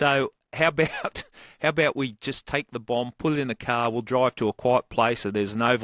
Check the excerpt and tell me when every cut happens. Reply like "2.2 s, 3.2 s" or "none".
none